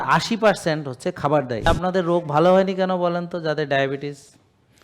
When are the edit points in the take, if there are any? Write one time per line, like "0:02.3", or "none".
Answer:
0:01.7